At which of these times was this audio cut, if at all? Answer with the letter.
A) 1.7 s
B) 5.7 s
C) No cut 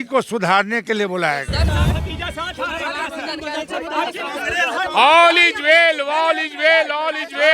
A